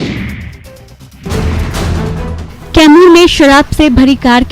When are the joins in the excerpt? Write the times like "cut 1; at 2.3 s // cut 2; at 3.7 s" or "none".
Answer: cut 1; at 1.0 s